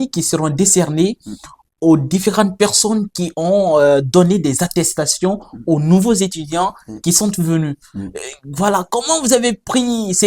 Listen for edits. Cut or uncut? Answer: uncut